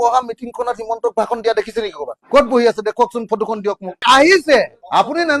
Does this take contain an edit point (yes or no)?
no